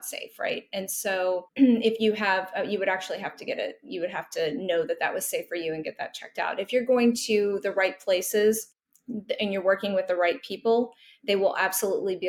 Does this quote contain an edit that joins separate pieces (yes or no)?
no